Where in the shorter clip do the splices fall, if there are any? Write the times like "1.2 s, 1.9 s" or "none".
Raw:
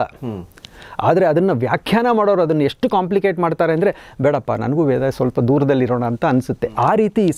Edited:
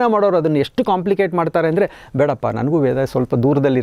none

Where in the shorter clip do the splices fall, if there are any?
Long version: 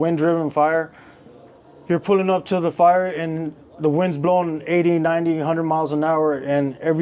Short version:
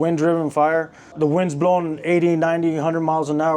1.0 s

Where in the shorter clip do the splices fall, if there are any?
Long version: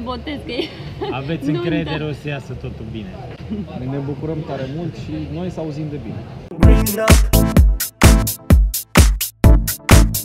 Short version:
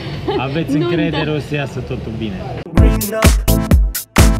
2.6 s

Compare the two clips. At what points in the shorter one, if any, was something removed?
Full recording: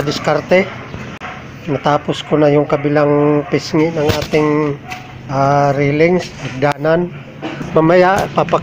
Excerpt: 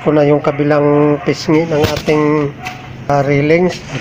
3.1 s

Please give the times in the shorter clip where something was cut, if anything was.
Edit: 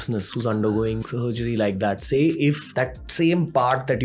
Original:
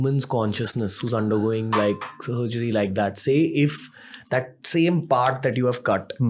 1.0 s, 2.7 s

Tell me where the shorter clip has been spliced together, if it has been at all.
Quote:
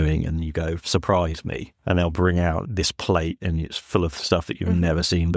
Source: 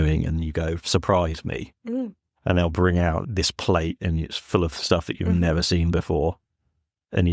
1.7 s

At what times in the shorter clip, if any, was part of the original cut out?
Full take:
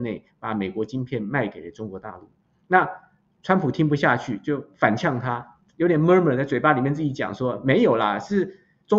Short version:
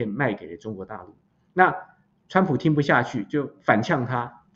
none

